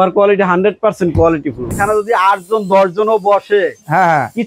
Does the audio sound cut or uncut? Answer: cut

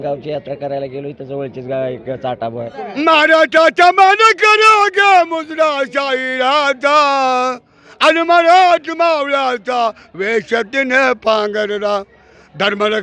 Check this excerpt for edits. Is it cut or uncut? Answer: cut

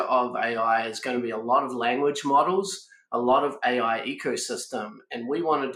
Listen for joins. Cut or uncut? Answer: uncut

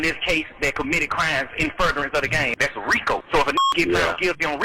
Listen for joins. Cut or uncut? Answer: cut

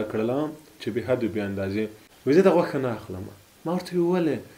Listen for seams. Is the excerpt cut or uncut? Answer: cut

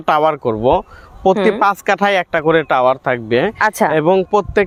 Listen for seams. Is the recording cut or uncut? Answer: uncut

